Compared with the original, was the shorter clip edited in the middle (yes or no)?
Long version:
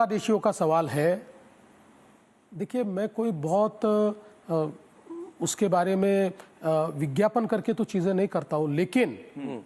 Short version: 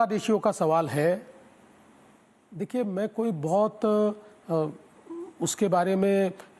no